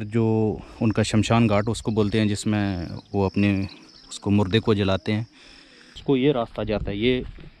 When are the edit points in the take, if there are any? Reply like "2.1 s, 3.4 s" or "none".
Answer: 5.9 s